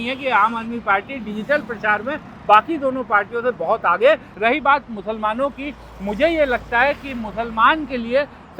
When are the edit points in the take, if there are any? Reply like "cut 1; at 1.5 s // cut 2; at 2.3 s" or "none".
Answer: cut 1; at 4.3 s